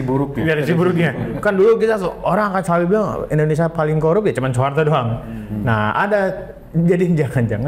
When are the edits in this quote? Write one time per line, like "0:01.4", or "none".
none